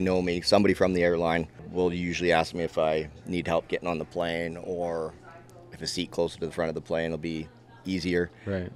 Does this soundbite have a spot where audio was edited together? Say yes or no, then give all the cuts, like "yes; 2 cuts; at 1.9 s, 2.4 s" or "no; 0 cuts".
yes; 1 cut; at 1.7 s